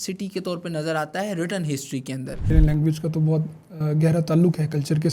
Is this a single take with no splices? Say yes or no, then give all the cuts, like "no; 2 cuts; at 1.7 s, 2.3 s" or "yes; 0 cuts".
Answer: no; 1 cut; at 2.4 s